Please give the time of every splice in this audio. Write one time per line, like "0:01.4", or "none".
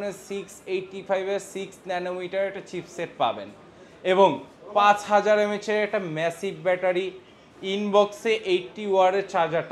none